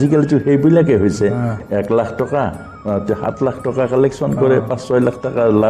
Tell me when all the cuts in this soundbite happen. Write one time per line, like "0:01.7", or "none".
0:01.6